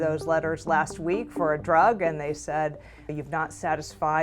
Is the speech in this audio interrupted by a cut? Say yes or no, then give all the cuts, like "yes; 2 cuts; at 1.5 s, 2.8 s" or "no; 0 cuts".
yes; 1 cut; at 3.1 s